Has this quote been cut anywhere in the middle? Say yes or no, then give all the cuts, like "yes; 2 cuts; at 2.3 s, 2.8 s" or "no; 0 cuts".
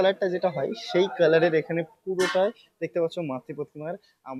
no; 0 cuts